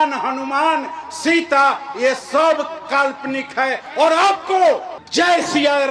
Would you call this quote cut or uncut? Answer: uncut